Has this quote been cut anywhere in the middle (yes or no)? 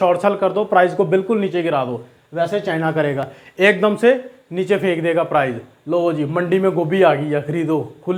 no